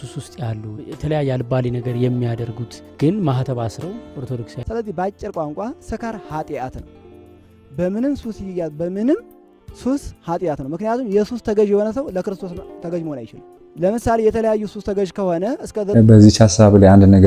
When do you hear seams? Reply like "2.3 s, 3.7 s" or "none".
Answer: 4.5 s